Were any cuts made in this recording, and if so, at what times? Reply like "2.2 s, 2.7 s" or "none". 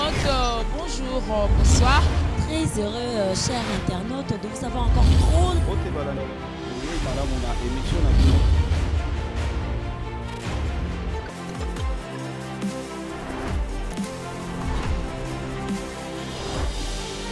none